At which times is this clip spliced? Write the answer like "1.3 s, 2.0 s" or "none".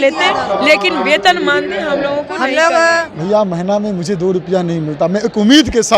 3.1 s